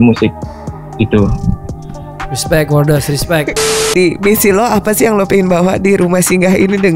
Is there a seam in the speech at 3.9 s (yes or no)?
yes